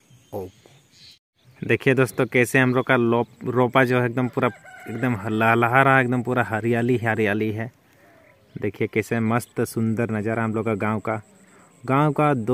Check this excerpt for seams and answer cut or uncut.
uncut